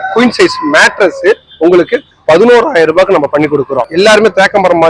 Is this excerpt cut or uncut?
cut